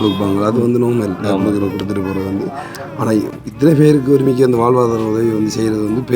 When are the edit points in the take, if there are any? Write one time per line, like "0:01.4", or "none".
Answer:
0:03.4